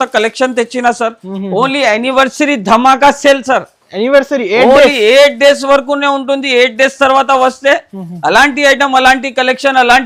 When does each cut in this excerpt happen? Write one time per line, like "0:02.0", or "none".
none